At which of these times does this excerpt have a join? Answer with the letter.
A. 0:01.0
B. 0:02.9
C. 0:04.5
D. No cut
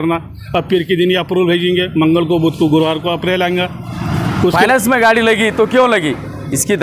C